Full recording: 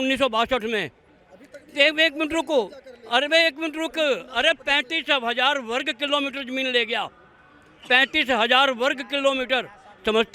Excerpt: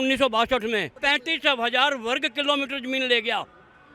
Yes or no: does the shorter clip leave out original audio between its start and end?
yes